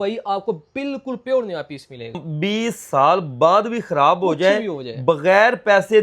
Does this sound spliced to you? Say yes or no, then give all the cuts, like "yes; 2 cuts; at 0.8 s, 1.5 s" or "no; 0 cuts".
yes; 1 cut; at 2.2 s